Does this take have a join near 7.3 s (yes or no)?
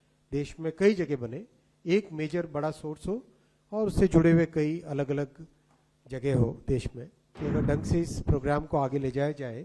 yes